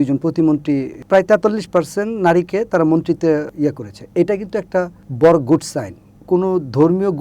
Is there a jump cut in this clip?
yes; 2 cuts; at 1.0 s, 6.1 s

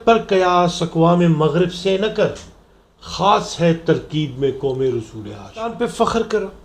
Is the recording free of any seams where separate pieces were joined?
no; 1 cut; at 5.7 s

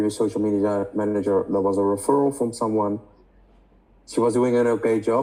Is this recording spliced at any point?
no; 0 cuts

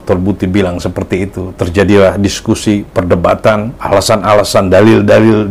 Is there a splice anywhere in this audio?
yes; 1 cut; at 3.8 s

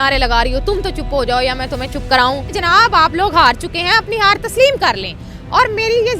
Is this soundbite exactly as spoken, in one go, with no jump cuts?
no; 1 cut; at 2.5 s

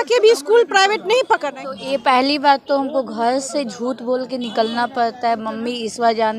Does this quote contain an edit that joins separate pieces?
yes; 1 cut; at 1.5 s

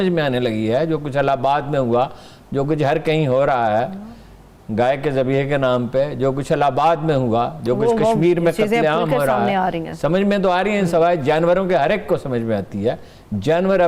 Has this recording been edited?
no; 0 cuts

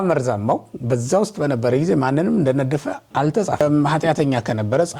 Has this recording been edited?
yes; 1 cut; at 3.6 s

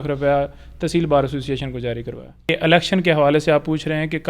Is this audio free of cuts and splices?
no; 1 cut; at 2.5 s

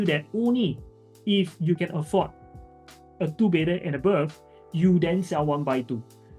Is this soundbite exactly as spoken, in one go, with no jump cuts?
yes; 0 cuts

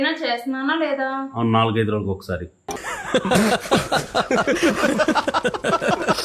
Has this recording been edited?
no; 0 cuts

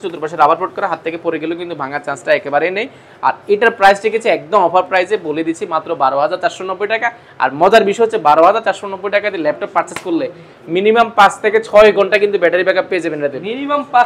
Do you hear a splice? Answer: no; 0 cuts

